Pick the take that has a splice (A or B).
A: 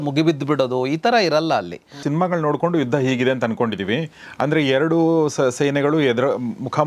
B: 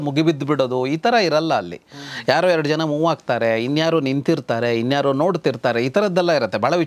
A